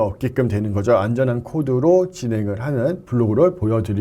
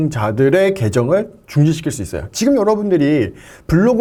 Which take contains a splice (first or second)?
first